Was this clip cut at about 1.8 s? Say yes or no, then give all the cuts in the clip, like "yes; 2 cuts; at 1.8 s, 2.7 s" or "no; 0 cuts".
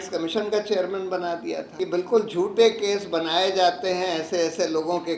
yes; 1 cut; at 1.8 s